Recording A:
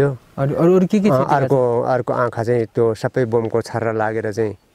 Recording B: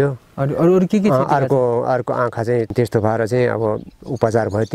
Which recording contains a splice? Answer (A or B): B